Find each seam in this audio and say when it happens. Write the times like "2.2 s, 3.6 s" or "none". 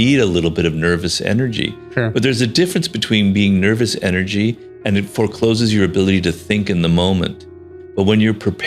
none